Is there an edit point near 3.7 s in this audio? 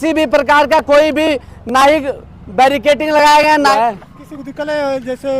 yes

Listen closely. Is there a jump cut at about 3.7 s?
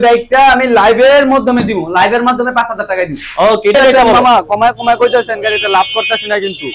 yes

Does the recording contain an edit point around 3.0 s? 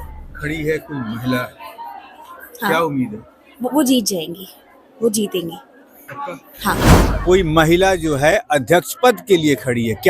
no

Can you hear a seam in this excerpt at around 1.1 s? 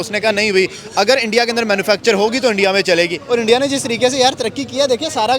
no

